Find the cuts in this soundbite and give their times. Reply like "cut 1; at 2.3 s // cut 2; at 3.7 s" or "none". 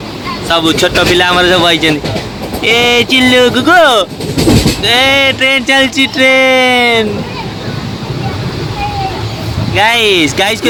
none